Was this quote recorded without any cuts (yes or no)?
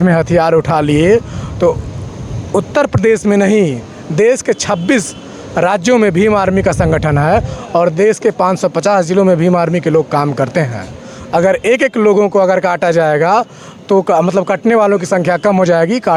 yes